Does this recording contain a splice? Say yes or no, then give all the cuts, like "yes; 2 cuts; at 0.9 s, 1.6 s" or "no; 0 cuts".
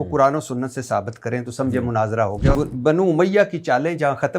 yes; 1 cut; at 2.5 s